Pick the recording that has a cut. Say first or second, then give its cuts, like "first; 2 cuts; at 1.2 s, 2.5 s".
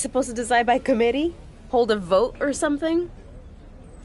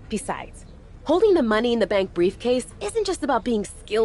first; 1 cut; at 3.1 s